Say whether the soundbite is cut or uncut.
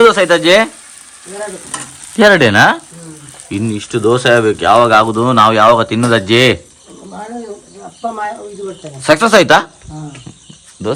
uncut